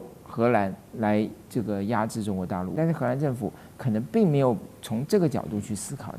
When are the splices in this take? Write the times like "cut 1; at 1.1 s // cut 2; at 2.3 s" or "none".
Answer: cut 1; at 2.7 s